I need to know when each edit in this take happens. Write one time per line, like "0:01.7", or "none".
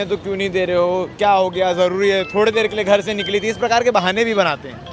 none